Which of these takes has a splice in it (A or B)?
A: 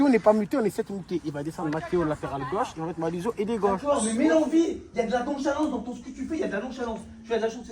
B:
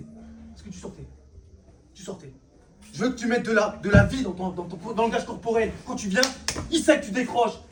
A